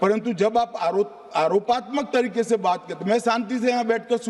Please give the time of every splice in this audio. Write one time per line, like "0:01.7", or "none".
none